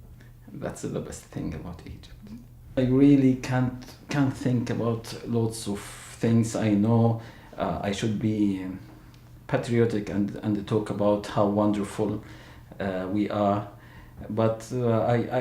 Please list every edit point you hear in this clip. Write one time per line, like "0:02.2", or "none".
0:01.0